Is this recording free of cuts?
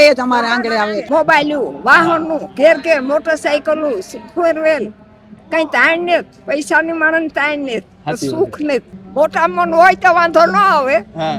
no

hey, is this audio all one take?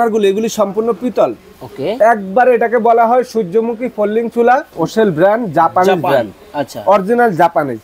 yes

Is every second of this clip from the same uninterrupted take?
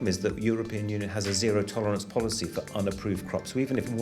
yes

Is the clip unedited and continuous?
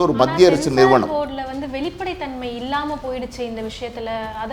yes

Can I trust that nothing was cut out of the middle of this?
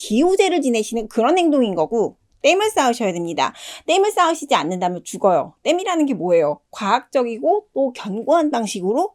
yes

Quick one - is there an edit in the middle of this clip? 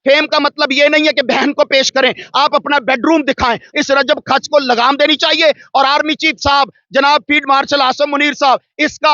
yes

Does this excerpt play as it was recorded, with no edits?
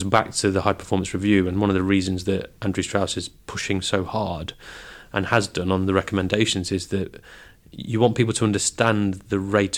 yes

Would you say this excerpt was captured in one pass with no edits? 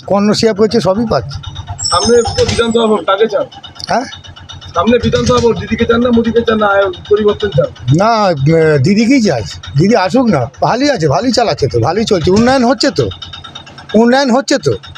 yes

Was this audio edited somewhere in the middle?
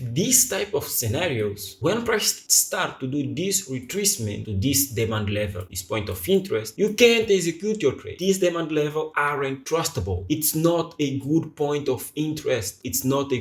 no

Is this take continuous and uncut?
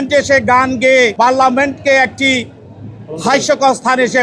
no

